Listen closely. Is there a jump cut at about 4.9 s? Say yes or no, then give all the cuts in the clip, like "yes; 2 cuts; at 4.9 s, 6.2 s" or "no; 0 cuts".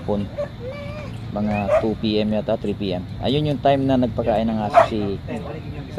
no; 0 cuts